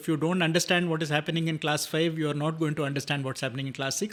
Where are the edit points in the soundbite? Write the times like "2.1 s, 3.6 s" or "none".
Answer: none